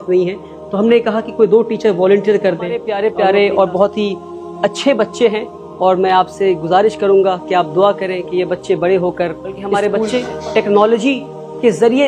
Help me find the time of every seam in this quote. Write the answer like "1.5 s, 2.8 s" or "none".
2.9 s, 9.8 s